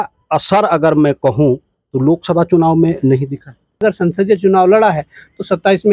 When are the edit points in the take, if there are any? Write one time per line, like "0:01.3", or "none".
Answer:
0:03.8